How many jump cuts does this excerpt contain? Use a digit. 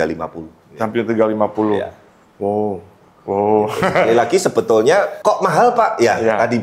1